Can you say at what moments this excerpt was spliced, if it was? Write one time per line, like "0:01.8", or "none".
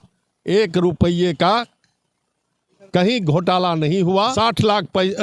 0:04.3